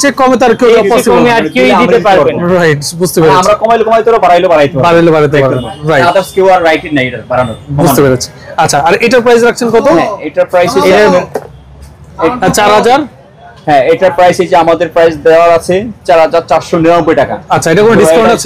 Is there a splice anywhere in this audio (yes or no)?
no